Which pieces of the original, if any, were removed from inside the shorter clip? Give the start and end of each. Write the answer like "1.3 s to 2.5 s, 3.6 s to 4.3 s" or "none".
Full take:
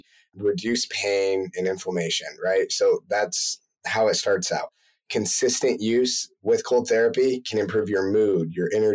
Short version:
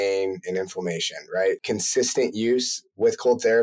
2.7 s to 5.1 s